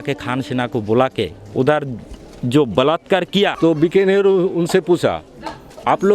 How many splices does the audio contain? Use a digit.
1